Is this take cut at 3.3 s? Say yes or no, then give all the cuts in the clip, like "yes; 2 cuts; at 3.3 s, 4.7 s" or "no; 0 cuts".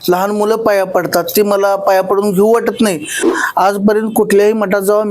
yes; 1 cut; at 3.3 s